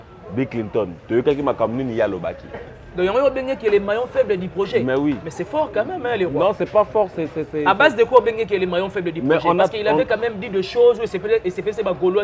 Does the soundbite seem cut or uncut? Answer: uncut